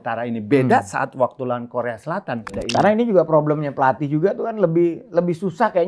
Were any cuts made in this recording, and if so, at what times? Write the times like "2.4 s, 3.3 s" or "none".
2.5 s